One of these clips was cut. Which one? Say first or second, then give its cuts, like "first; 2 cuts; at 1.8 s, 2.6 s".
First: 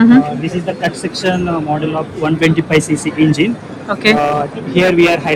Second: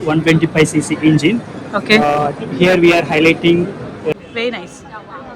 second; 1 cut; at 4.1 s